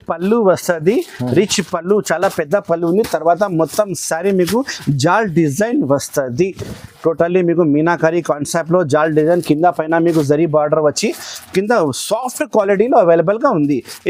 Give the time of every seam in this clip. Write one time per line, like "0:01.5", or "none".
none